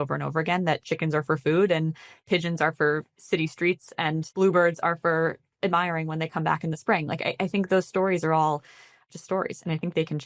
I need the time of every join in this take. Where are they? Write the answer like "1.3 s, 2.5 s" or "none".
2.2 s, 4.3 s, 8.9 s